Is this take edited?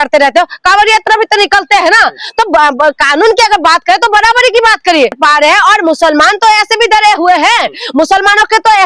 yes; 1 cut; at 5.2 s

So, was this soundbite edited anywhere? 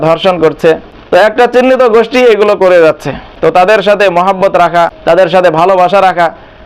yes; 3 cuts; at 0.9 s, 3.7 s, 5.0 s

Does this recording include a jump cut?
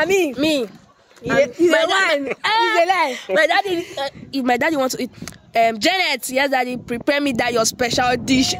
no; 0 cuts

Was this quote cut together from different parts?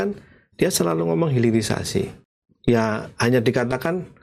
yes; 1 cut; at 2.2 s

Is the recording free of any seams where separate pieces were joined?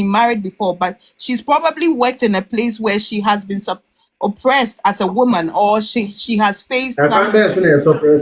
yes; 0 cuts

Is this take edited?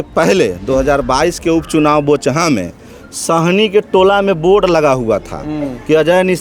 no; 0 cuts

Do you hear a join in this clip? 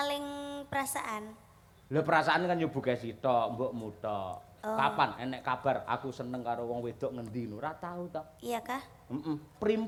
no; 0 cuts

